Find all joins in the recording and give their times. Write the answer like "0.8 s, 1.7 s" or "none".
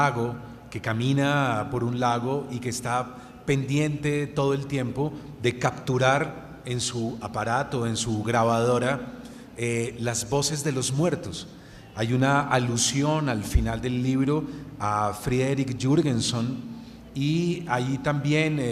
13.7 s